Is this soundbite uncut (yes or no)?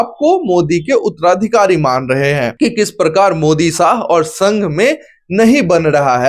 no